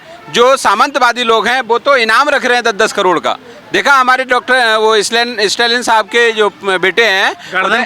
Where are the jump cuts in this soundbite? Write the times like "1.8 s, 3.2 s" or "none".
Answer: none